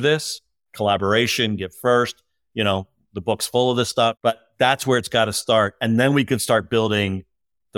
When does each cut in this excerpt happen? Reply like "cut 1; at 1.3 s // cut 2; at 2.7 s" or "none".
cut 1; at 4.2 s